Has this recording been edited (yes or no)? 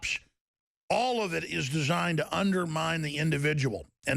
yes